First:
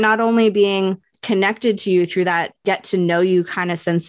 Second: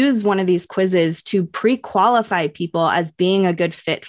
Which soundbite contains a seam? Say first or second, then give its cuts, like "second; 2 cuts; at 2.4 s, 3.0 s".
first; 2 cuts; at 1.1 s, 2.5 s